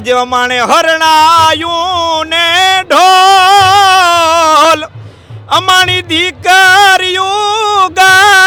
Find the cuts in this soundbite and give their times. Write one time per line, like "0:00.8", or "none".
none